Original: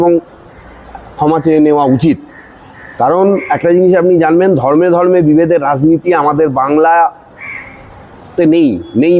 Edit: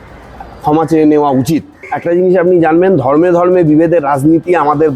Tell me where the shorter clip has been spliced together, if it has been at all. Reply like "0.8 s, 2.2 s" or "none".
1.9 s